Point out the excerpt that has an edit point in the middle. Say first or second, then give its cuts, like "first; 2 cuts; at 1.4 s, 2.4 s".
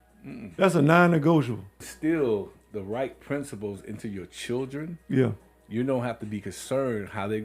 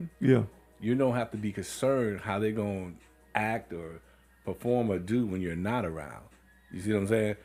first; 1 cut; at 1.9 s